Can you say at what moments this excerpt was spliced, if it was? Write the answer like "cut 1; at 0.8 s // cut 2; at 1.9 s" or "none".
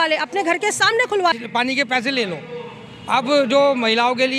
cut 1; at 1.4 s